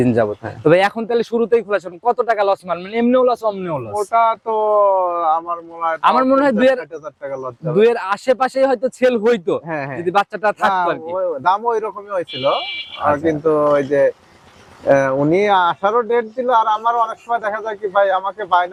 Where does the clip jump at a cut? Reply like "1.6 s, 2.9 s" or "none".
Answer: none